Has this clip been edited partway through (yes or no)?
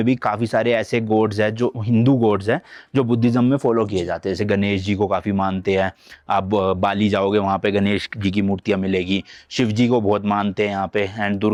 no